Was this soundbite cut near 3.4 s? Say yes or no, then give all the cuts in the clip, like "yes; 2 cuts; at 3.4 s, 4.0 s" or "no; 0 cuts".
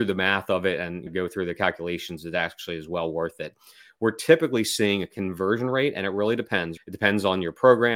no; 2 cuts; at 1.1 s, 6.7 s